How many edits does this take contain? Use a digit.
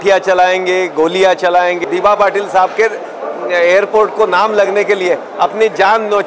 1